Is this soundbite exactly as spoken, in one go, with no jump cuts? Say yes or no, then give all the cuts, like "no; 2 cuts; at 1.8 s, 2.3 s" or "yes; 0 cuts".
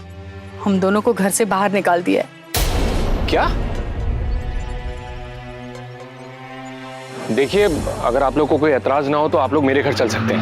yes; 0 cuts